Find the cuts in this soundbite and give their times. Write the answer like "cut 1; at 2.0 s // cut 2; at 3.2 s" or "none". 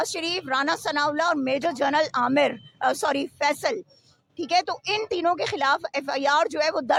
none